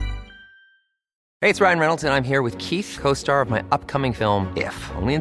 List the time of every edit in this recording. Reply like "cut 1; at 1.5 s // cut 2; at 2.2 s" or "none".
cut 1; at 1.2 s